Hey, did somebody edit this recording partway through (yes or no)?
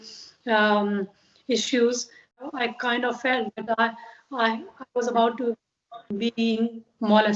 yes